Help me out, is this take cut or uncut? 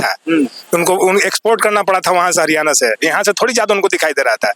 uncut